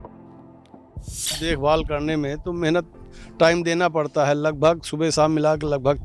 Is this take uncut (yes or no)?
no